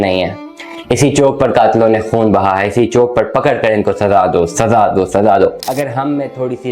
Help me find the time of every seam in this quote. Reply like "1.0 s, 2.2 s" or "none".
5.6 s